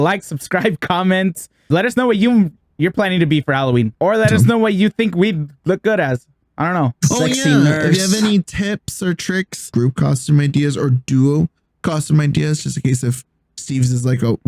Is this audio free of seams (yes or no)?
no